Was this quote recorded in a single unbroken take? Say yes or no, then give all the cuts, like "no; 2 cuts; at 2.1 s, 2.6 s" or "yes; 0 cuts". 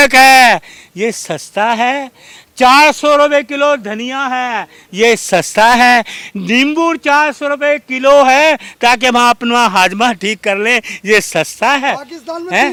yes; 0 cuts